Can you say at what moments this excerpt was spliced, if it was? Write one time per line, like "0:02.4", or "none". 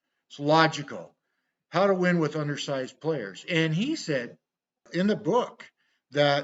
0:04.8